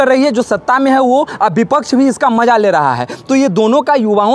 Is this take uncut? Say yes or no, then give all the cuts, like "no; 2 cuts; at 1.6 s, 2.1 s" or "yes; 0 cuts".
yes; 0 cuts